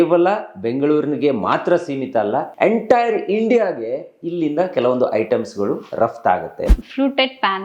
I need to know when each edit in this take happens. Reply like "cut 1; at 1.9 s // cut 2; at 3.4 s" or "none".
cut 1; at 2.5 s // cut 2; at 6.7 s